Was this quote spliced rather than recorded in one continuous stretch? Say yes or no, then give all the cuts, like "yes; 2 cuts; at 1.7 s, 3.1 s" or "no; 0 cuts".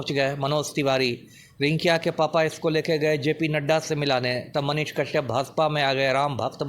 no; 0 cuts